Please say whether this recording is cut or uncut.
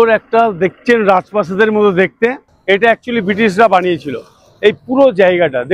uncut